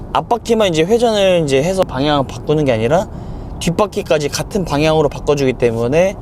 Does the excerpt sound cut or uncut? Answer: cut